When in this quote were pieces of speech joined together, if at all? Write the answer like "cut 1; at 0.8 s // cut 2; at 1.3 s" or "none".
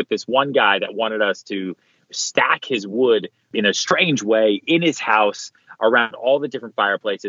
cut 1; at 3.5 s

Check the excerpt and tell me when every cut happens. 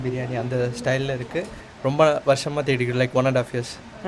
cut 1; at 1.6 s

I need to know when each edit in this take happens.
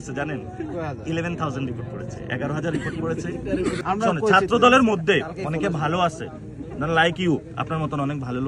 cut 1; at 3.8 s

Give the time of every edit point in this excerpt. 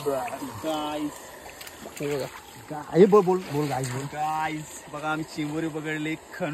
none

